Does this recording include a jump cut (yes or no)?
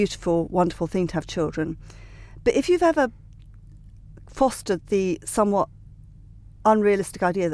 no